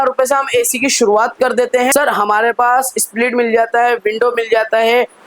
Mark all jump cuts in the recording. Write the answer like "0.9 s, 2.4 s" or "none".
1.9 s

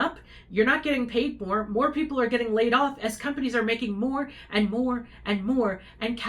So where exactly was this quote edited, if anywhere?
none

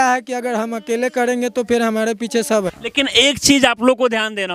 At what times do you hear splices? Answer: 2.8 s

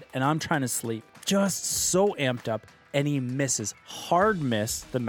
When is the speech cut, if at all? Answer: 0.9 s

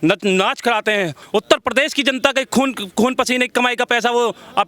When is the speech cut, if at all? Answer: 1.2 s

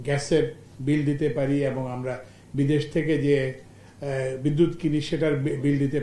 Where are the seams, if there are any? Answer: none

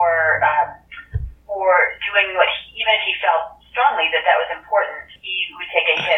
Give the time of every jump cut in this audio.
5.2 s

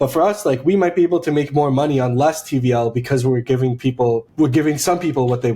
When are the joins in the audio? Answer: 4.3 s

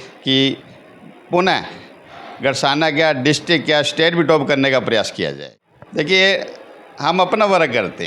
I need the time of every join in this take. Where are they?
5.5 s

